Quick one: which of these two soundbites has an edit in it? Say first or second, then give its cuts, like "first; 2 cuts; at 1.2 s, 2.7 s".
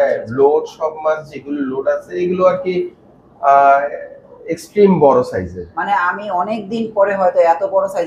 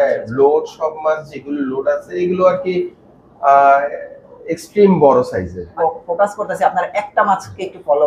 second; 1 cut; at 5.7 s